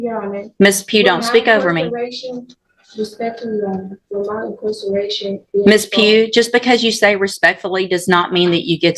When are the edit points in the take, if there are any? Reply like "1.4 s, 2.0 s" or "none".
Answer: none